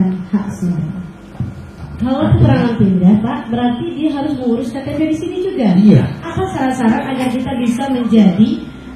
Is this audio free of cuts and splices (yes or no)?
no